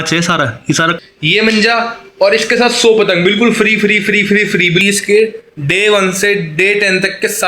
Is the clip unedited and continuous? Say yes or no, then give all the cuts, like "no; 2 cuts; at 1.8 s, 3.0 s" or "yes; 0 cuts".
no; 2 cuts; at 1.0 s, 4.8 s